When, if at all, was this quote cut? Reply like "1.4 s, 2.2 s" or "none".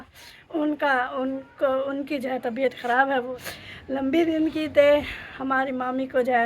3.3 s

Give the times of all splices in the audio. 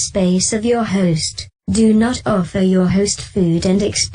1.5 s

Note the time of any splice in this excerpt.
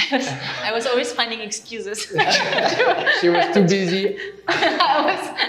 none

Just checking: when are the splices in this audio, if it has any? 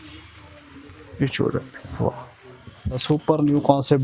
3.0 s

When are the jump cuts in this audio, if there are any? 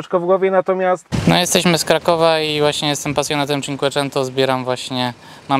1.1 s

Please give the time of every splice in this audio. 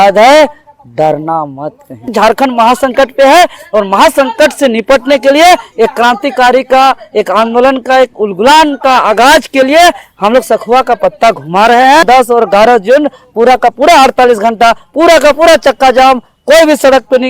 2.1 s, 12.0 s

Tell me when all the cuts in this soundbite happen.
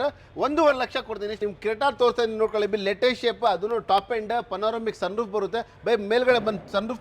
1.4 s

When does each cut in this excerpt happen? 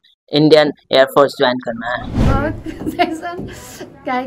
2.3 s

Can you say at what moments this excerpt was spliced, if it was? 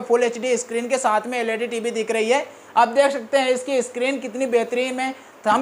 none

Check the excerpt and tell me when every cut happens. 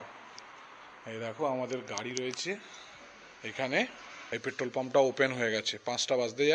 4.0 s

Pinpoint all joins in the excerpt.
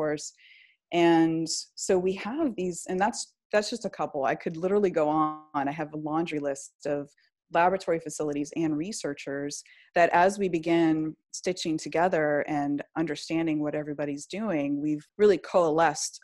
15.1 s

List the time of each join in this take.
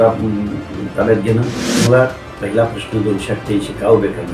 1.6 s

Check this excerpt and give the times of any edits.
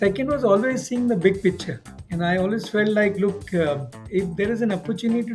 3.9 s

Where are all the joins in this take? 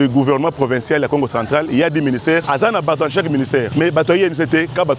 2.4 s, 3.7 s

